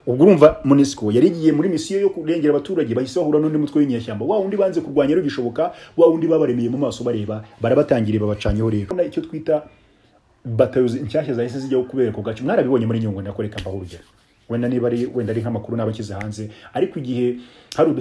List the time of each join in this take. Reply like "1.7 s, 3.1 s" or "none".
8.9 s